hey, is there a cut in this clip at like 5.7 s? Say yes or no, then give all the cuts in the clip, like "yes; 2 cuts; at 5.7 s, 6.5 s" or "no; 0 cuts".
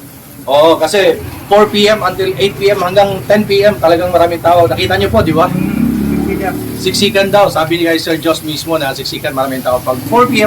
no; 1 cut; at 1.2 s